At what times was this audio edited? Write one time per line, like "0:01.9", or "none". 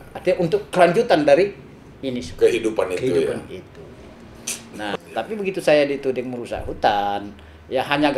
0:04.9